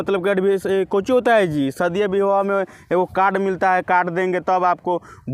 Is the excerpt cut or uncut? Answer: uncut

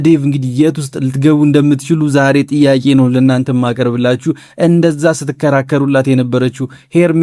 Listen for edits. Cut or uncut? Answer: uncut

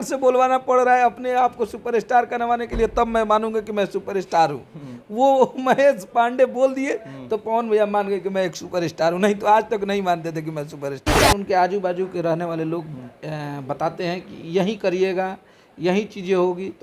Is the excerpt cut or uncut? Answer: cut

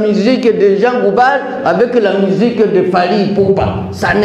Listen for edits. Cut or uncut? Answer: uncut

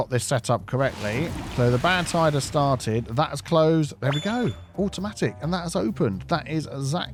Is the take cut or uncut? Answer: uncut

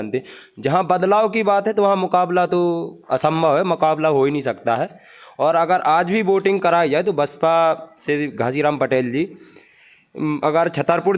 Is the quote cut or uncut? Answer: uncut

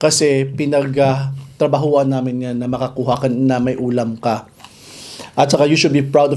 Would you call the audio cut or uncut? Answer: uncut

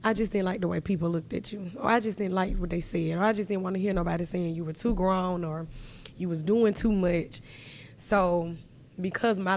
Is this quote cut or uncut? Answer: uncut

